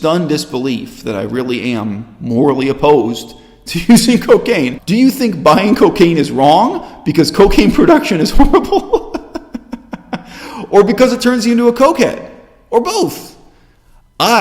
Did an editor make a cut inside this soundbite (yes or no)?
yes